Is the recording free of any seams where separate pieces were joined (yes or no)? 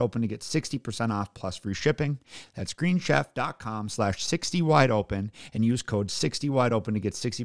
yes